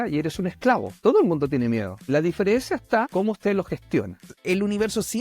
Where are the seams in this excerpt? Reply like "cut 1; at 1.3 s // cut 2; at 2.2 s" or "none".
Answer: cut 1; at 1.0 s // cut 2; at 1.9 s // cut 3; at 3.1 s // cut 4; at 4.4 s